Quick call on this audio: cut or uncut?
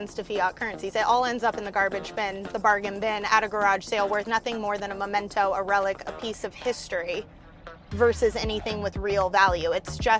uncut